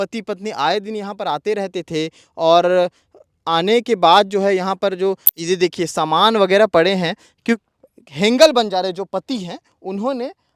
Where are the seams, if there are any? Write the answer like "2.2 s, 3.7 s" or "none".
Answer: 7.6 s

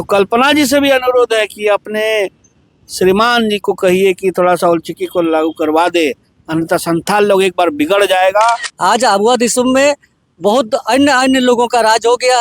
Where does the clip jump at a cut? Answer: 8.7 s

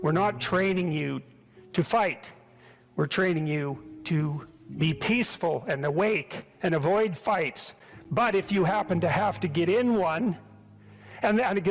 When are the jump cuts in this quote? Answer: none

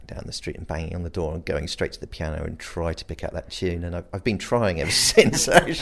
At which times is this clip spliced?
none

